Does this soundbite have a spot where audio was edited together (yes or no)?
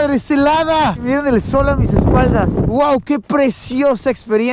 yes